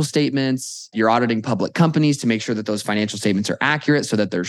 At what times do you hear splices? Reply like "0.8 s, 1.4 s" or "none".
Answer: 0.9 s